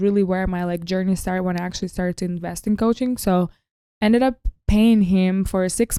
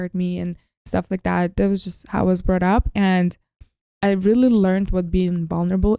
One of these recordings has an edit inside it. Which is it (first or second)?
second